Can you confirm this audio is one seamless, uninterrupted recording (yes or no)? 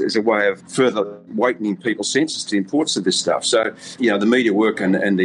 no